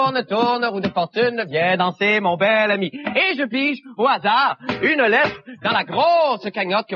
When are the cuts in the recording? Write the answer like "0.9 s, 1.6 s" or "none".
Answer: none